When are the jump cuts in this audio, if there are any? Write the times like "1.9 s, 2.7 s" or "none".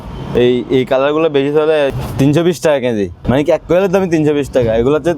2.0 s, 3.2 s